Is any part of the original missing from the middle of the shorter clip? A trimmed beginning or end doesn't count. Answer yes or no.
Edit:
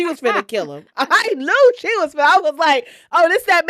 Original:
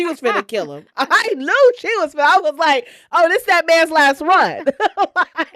no